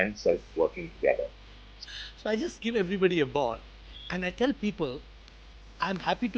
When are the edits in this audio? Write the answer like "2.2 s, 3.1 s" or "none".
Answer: 1.7 s

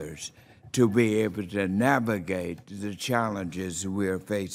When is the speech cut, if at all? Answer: none

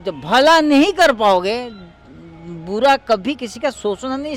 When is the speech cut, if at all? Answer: none

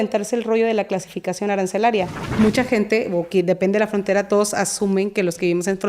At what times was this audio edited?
2.2 s

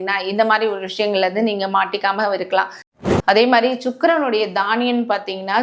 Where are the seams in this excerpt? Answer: 2.8 s

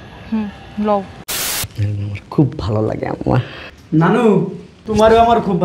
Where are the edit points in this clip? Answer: 1.2 s

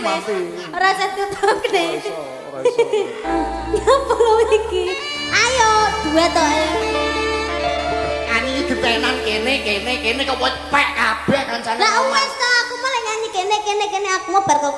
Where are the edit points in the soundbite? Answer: 3.3 s

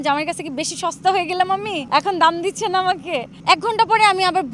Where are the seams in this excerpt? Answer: 1.8 s, 3.3 s

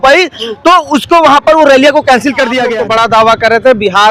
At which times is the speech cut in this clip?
2.7 s

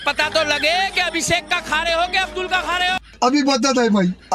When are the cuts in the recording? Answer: 3.1 s

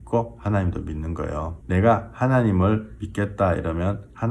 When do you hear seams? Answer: 1.6 s

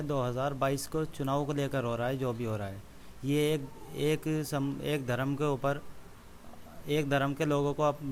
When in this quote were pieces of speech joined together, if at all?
none

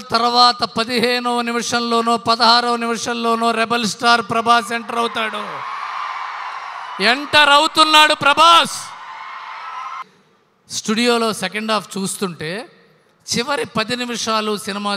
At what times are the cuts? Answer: 10.0 s

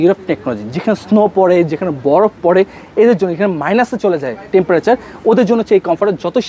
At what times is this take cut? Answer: none

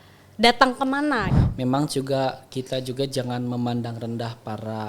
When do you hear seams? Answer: 1.4 s

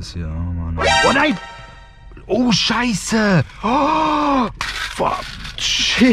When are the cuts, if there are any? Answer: none

